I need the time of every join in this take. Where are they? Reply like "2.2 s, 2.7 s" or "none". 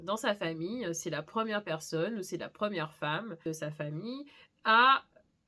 none